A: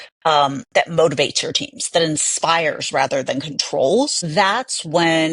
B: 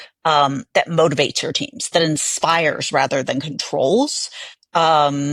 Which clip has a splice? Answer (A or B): A